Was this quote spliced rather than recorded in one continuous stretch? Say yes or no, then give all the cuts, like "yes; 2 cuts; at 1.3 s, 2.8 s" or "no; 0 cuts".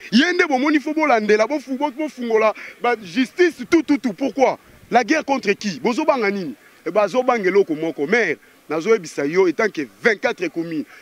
no; 0 cuts